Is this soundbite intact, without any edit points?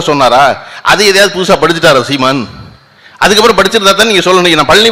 yes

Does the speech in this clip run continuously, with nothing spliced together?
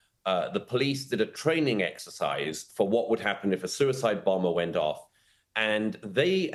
yes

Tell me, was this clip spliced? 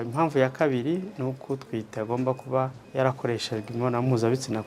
yes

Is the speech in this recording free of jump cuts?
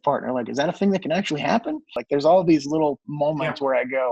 no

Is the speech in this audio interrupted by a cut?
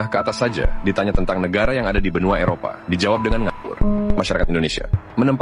yes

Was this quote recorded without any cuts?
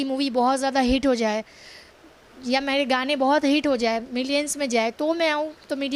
yes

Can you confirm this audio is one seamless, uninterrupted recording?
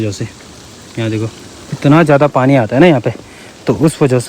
yes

